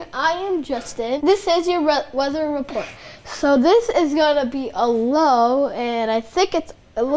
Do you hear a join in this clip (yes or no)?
yes